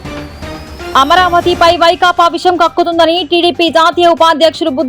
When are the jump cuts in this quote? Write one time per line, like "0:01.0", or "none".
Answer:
0:00.9